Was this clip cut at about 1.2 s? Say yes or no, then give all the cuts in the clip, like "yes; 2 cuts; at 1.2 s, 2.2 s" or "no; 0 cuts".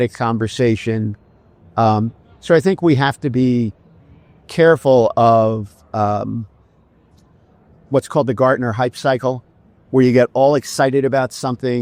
no; 0 cuts